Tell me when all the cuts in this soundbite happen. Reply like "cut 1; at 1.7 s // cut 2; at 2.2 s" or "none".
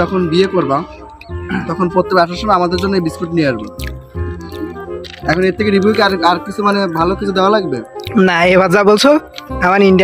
none